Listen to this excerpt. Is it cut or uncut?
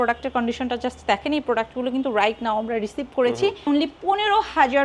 cut